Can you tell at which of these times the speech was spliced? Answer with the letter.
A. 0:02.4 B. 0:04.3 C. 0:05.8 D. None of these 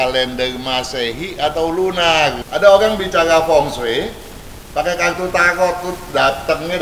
A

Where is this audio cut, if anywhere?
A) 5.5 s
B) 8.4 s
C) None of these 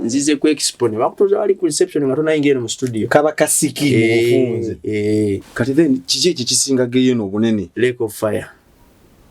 A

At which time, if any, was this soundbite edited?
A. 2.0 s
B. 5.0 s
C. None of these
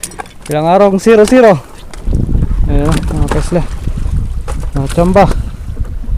A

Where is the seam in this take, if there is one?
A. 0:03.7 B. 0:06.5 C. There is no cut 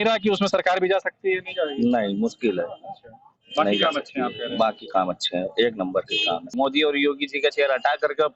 B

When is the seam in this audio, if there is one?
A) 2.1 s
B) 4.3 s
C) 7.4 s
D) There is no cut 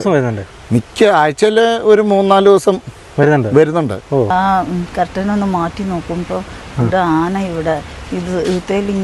B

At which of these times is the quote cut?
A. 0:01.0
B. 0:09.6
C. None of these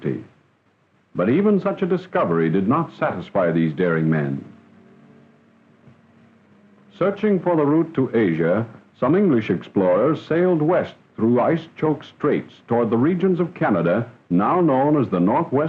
A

